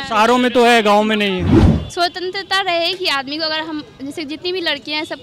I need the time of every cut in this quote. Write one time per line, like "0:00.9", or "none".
0:01.7